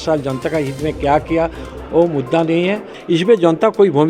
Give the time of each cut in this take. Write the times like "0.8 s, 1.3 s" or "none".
2.9 s

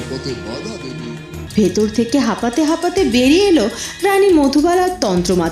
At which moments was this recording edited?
1.3 s

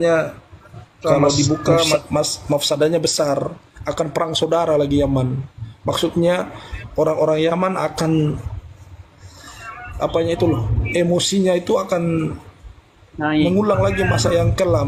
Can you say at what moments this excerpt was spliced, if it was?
2.0 s

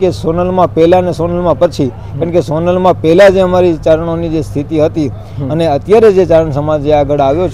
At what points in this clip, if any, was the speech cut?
none

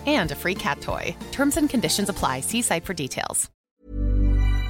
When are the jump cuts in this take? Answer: 3.5 s

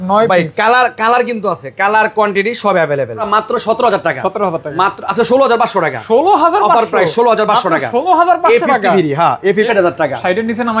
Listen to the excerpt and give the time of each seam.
3.2 s, 9.7 s

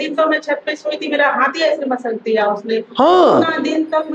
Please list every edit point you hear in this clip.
none

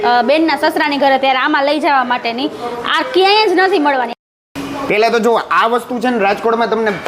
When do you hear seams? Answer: 4.2 s

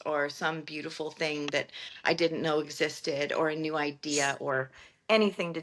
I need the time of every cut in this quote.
none

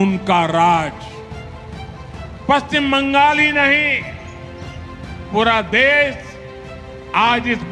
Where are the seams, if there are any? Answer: 0.9 s, 2.5 s

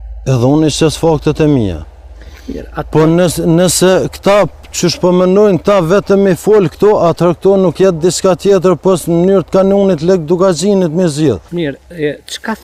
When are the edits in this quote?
7.8 s

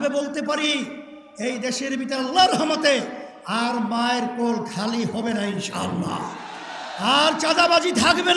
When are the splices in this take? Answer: none

